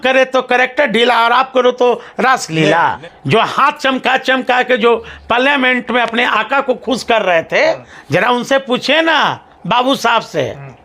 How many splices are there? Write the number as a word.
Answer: two